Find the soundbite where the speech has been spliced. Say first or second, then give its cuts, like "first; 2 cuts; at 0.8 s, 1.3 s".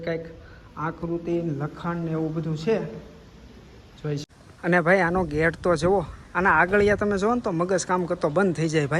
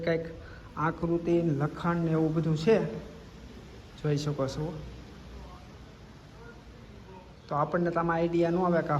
first; 1 cut; at 4.3 s